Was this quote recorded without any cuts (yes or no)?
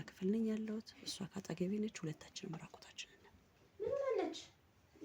no